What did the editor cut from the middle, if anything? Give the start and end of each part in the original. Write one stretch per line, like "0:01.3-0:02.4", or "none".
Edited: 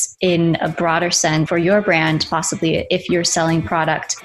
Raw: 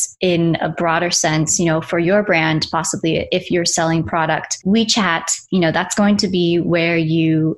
0:01.5-0:01.9